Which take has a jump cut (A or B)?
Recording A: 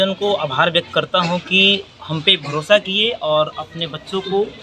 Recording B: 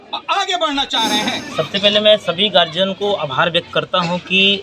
B